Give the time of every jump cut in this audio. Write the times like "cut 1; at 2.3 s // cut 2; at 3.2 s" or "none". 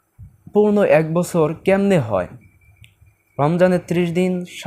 none

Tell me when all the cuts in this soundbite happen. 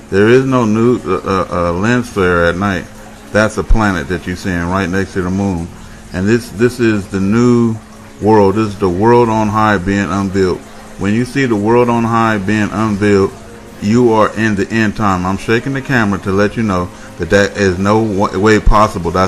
cut 1; at 3.3 s

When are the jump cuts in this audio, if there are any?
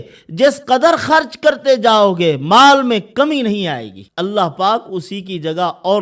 cut 1; at 4.0 s

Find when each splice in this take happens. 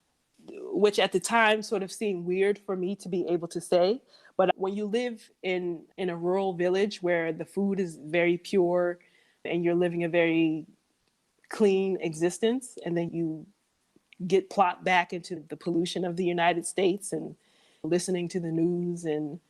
cut 1; at 13.1 s // cut 2; at 15.4 s

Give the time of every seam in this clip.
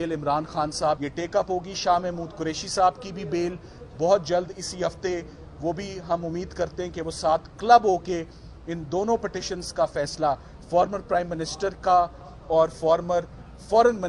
cut 1; at 1.0 s

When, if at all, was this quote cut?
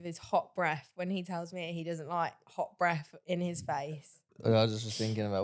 cut 1; at 3.9 s

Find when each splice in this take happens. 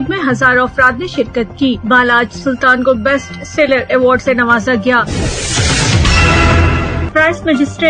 cut 1; at 5.0 s // cut 2; at 7.1 s

